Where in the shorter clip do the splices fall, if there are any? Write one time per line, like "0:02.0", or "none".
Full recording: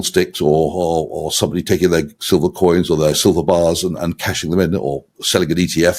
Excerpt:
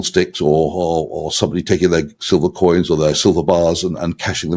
none